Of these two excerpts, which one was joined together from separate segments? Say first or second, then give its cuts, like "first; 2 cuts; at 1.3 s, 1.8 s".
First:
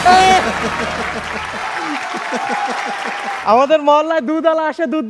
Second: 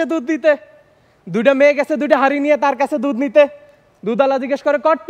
first; 1 cut; at 3.4 s